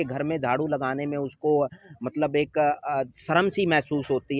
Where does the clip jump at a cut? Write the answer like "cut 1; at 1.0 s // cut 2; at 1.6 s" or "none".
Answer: none